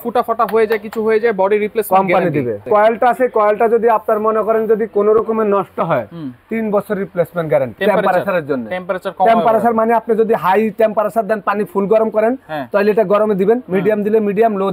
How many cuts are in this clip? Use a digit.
2